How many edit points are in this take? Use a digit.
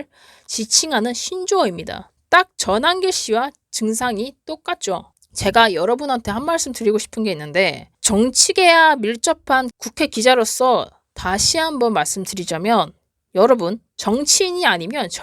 2